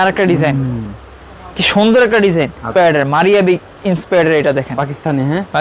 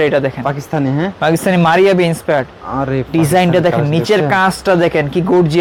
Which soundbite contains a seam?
first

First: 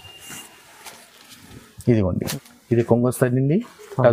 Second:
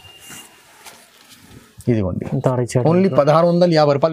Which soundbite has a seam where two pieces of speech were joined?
first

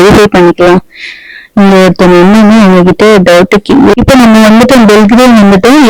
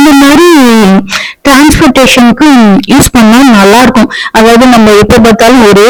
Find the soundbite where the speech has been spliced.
first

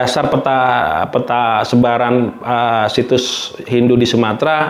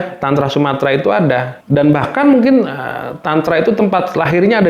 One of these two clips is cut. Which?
second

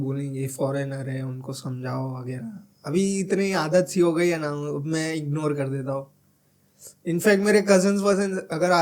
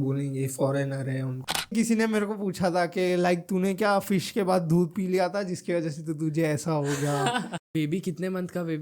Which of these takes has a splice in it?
second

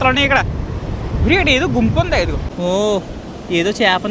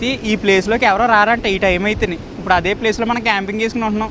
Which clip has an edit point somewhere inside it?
first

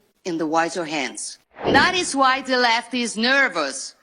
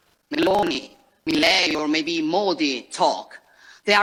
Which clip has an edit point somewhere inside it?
first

